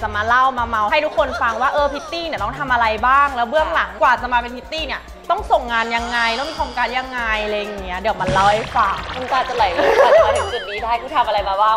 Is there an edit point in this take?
no; 0 cuts

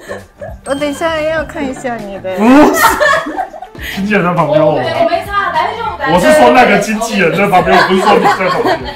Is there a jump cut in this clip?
no; 0 cuts

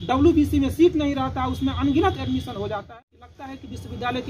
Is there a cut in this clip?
yes; 1 cut; at 2.9 s

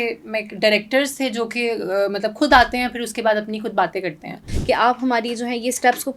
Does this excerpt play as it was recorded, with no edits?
no; 1 cut; at 4.5 s

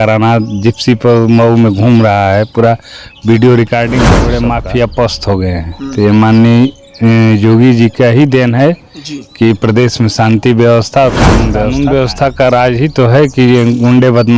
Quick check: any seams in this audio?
yes; 2 cuts; at 4.3 s, 11.7 s

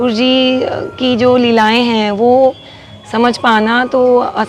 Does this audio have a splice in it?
no; 0 cuts

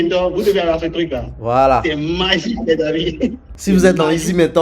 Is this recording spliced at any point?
yes; 1 cut; at 3.5 s

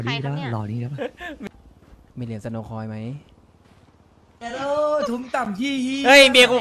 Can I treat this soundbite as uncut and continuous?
no; 1 cut; at 1.4 s

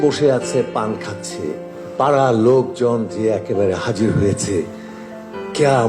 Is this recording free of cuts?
no; 1 cut; at 1.7 s

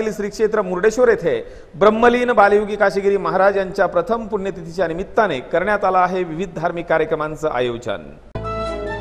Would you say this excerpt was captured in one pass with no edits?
yes; 0 cuts

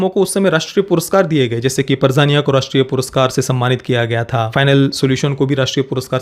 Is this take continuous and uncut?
no; 1 cut; at 4.5 s

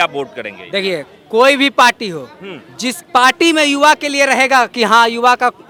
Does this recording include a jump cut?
no; 0 cuts

